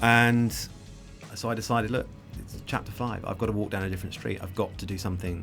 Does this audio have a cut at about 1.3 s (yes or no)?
yes